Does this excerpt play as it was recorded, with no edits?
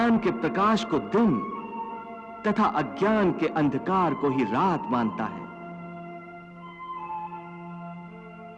yes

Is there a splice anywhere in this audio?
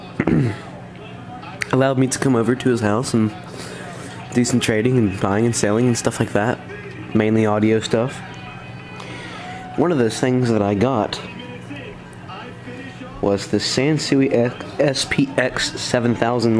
yes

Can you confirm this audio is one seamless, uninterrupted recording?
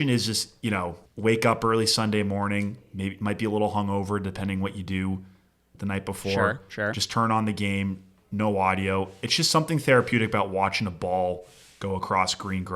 no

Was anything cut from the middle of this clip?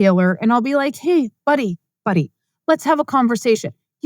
no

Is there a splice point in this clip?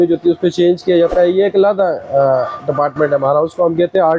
no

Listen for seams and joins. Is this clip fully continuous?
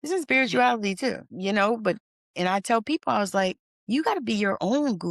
no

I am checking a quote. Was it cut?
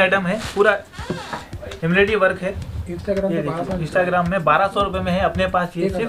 no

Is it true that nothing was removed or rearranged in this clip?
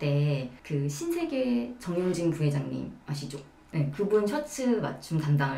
yes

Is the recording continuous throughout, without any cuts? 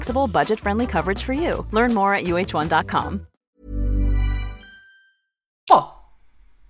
yes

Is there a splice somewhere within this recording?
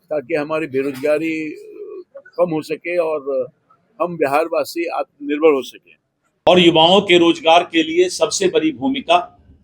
yes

